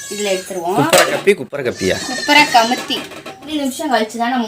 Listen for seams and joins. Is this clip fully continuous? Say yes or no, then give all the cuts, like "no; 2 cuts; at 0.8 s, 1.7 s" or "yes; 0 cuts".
no; 1 cut; at 3.5 s